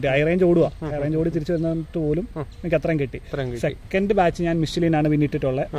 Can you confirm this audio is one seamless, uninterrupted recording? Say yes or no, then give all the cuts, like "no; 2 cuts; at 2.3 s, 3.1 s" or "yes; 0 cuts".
yes; 0 cuts